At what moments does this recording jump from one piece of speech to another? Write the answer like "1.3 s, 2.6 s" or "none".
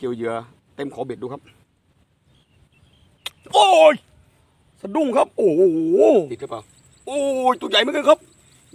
6.3 s

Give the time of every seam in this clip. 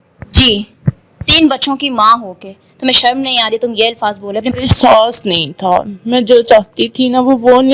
4.5 s

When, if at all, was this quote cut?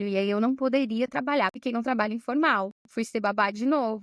1.6 s

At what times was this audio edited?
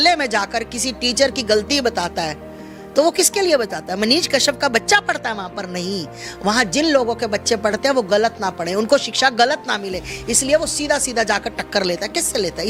none

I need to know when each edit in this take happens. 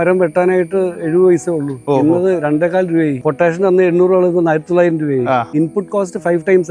3.2 s, 5.5 s

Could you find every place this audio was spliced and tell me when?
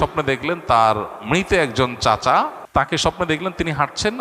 2.6 s

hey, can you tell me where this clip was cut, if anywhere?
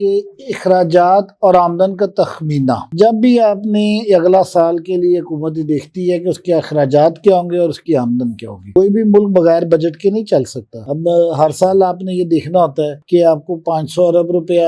none

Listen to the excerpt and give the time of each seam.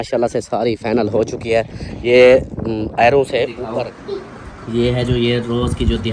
3.6 s

